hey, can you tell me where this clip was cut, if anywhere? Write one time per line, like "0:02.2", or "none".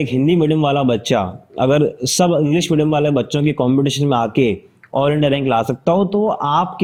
none